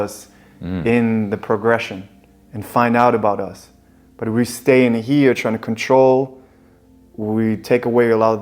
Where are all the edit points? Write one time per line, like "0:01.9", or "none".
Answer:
none